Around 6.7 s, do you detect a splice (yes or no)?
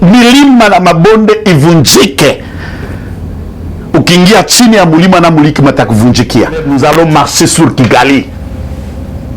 yes